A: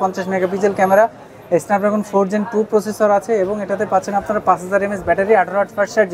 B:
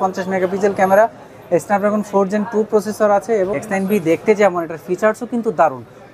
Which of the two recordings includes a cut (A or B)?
B